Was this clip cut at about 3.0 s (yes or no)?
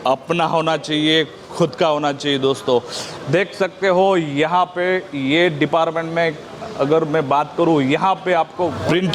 no